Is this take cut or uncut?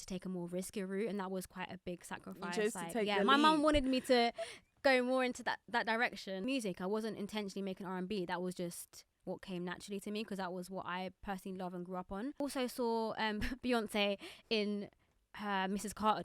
cut